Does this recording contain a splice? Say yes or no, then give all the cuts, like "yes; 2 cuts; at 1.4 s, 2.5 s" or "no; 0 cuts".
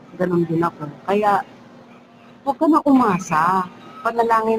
no; 0 cuts